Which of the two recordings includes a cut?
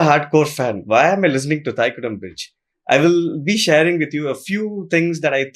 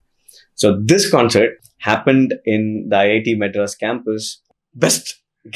second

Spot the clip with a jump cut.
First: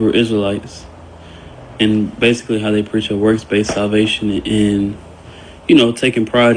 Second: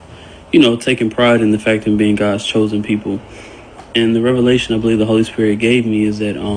second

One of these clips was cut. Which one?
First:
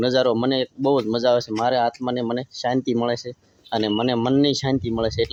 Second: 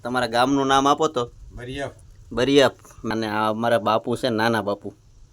second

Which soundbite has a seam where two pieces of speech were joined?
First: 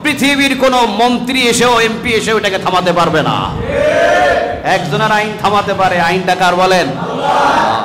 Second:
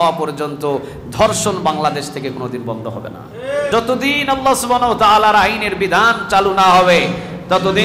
second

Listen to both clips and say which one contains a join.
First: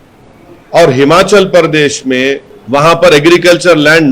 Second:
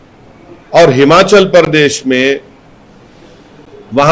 first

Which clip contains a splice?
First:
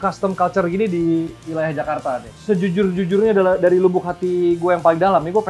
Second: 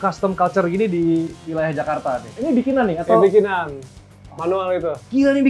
second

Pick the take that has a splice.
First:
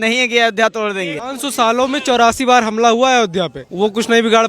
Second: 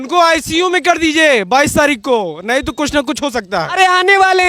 first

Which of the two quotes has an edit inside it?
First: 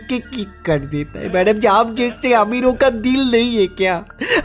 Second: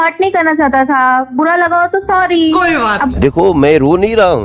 second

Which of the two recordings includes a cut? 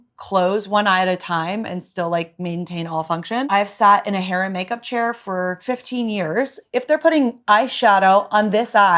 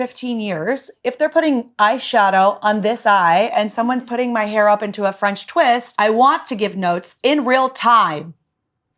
first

